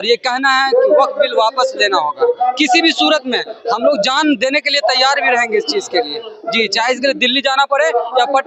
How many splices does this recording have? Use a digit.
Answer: 0